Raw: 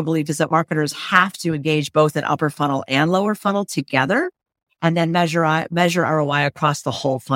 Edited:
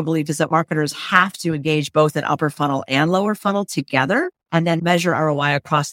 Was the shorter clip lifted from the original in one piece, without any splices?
no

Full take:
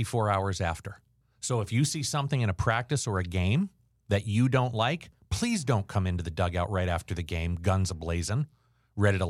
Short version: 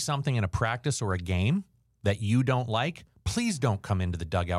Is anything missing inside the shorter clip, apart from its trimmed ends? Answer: no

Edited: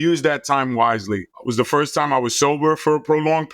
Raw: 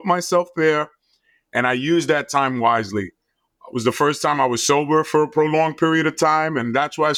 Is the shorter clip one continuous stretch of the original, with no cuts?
no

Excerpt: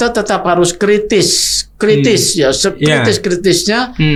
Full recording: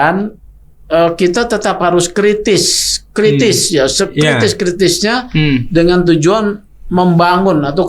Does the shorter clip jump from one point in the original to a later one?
no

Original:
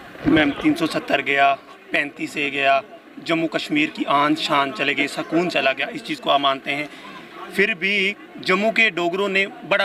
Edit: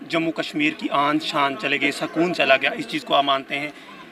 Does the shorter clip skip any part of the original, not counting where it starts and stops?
no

